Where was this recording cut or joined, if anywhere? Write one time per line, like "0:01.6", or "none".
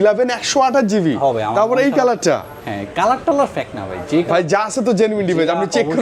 none